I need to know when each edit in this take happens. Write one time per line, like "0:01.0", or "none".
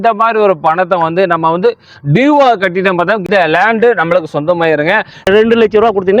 0:03.2
0:05.3